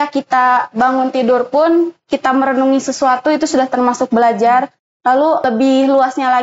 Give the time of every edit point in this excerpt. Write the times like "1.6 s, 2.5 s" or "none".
5.4 s